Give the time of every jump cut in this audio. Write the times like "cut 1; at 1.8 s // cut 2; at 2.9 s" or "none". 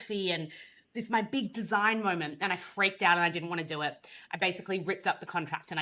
none